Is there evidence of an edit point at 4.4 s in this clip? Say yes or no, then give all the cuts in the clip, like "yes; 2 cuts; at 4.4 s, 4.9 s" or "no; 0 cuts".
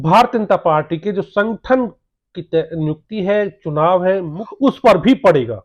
yes; 1 cut; at 4.4 s